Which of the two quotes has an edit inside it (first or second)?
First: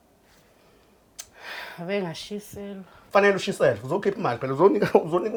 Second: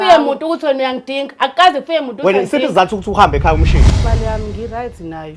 second